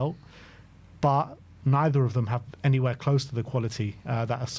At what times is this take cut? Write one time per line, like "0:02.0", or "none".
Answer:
none